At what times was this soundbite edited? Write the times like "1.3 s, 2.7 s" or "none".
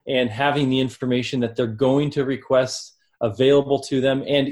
none